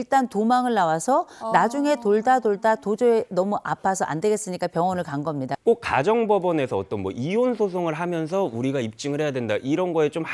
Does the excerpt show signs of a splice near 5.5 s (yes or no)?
yes